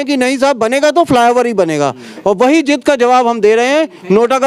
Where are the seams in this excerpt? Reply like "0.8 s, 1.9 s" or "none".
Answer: none